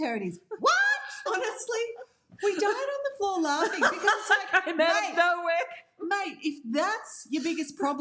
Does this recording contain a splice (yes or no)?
yes